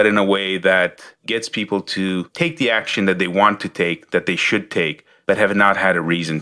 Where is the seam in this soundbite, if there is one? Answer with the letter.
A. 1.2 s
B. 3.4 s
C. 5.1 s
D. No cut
C